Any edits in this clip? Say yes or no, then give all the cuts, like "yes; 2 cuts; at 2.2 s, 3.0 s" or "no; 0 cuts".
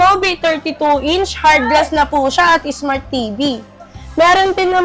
no; 0 cuts